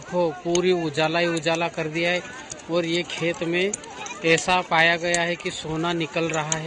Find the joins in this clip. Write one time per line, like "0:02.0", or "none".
none